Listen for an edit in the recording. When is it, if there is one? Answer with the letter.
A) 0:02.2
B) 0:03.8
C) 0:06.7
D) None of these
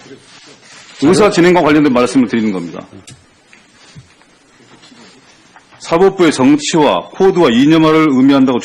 C